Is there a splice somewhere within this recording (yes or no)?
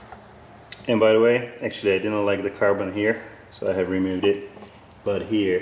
no